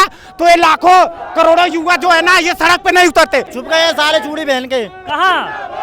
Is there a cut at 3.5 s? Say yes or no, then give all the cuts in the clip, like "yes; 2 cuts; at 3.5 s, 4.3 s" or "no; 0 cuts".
yes; 1 cut; at 3.5 s